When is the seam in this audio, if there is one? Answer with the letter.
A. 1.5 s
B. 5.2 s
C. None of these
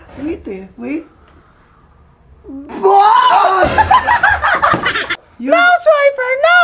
B